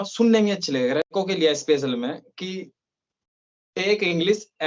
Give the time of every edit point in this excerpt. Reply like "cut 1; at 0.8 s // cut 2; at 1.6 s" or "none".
cut 1; at 1.1 s